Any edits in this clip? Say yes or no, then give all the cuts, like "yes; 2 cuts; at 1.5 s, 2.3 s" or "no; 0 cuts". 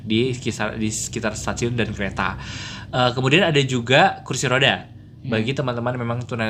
no; 0 cuts